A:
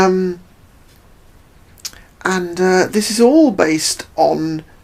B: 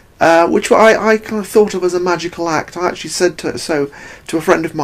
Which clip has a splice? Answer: B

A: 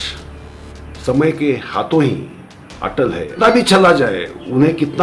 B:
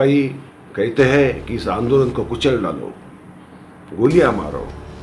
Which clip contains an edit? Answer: A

